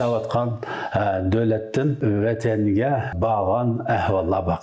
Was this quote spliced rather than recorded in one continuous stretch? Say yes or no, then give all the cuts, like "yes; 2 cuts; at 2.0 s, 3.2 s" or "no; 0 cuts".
yes; 2 cuts; at 2.0 s, 3.1 s